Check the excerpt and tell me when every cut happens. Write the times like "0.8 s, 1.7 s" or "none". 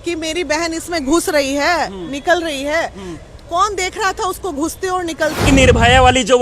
5.4 s